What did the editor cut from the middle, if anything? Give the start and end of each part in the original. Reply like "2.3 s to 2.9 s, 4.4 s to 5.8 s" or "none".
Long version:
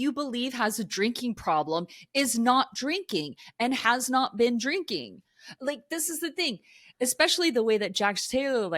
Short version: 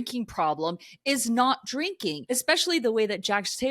3.3 s to 6.9 s